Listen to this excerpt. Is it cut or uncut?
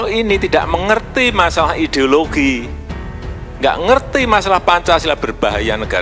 uncut